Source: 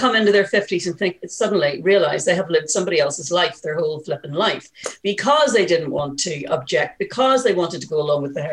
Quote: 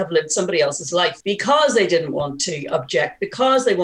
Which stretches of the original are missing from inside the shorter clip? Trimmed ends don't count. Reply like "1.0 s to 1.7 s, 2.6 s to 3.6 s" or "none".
3.6 s to 5.0 s